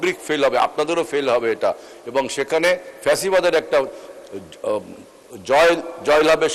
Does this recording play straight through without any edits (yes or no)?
yes